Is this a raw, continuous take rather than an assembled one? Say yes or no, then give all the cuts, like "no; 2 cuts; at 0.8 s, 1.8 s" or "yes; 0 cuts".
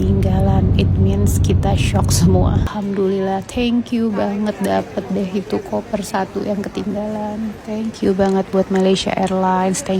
no; 1 cut; at 2.7 s